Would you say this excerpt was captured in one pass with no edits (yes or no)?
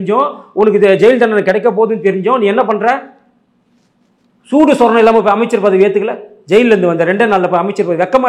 yes